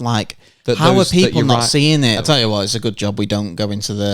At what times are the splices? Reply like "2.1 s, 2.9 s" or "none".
2.2 s